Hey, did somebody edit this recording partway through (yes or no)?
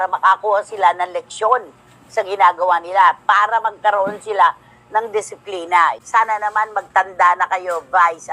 yes